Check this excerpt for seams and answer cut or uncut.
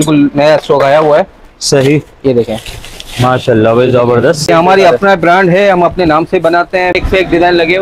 cut